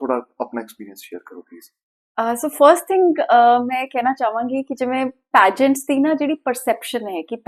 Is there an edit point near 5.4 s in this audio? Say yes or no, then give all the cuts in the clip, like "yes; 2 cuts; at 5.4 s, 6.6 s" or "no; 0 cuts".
no; 0 cuts